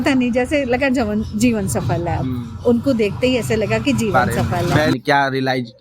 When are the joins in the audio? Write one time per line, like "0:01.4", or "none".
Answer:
0:04.9